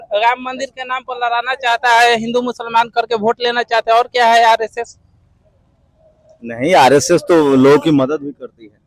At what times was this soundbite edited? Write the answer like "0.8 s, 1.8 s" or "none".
none